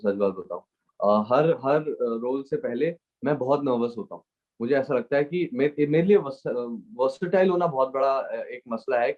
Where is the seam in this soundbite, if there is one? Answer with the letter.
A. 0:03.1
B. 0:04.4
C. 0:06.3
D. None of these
D